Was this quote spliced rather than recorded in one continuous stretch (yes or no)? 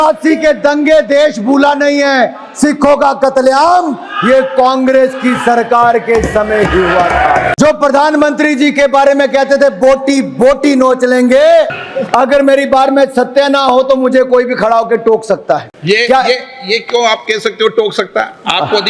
yes